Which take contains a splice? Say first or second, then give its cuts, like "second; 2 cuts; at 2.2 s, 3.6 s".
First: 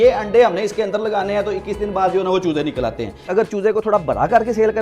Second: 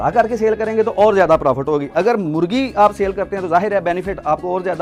first; 1 cut; at 3.2 s